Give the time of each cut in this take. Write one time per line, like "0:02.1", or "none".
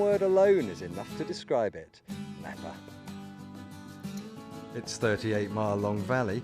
0:03.8